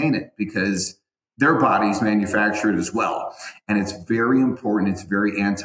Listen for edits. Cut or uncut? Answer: uncut